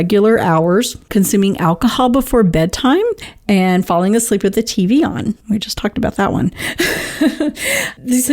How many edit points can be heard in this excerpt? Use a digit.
3